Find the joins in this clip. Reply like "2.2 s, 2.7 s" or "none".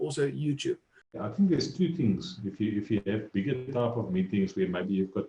1.2 s